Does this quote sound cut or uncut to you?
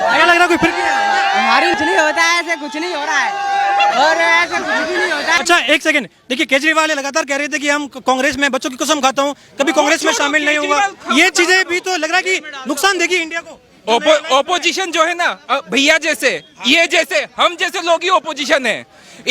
cut